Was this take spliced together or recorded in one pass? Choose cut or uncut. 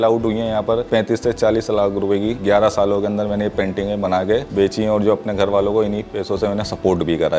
cut